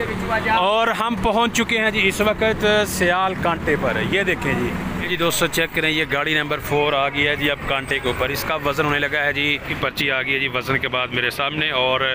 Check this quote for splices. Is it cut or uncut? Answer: cut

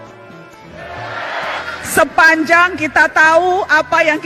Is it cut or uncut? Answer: cut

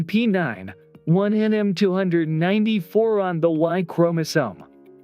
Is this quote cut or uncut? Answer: cut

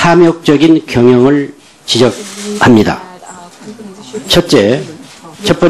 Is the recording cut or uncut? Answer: uncut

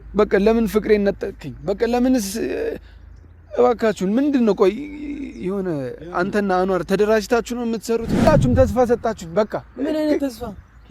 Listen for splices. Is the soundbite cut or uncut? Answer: cut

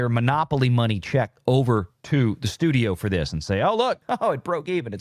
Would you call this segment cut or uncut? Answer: cut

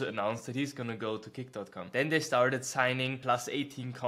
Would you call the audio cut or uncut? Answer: cut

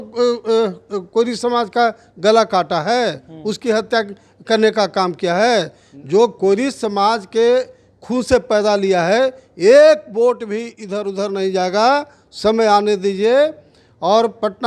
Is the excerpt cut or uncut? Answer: uncut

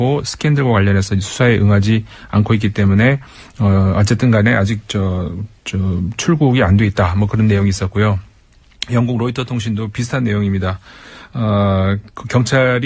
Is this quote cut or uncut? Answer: cut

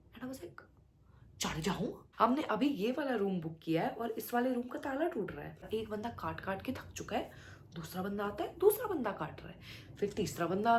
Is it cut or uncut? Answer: cut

